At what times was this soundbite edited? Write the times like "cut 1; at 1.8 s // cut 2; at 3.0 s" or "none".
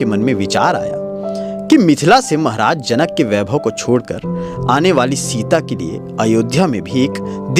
none